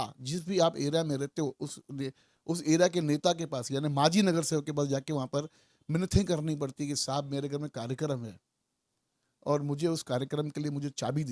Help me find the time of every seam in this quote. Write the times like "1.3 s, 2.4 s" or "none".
none

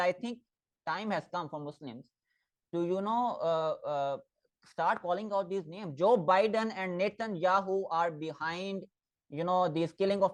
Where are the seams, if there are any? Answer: none

